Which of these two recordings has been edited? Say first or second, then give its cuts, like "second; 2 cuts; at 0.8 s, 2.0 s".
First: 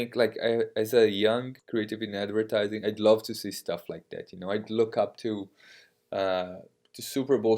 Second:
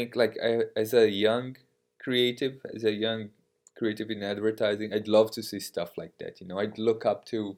first; 1 cut; at 1.6 s